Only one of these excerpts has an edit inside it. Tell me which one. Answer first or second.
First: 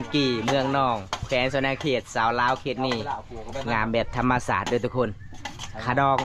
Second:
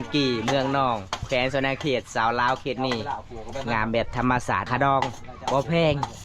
second